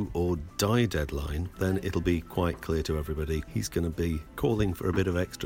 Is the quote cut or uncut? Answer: cut